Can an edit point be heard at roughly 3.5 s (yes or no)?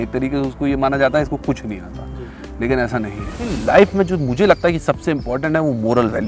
yes